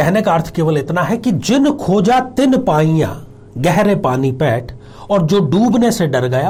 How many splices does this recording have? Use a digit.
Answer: 0